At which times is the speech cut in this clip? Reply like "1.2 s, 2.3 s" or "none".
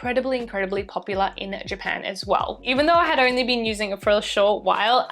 2.6 s